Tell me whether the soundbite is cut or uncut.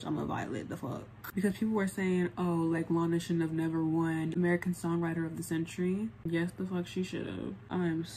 uncut